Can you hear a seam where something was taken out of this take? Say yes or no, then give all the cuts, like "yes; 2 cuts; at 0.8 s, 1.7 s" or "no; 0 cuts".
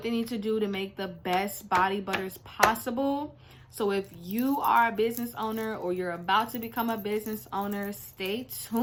no; 0 cuts